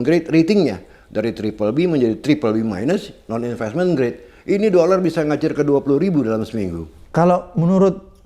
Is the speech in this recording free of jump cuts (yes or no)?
yes